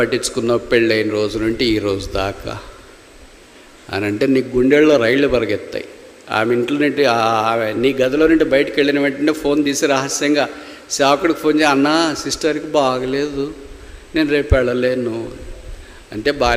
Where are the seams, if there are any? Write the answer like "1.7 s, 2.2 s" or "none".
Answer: none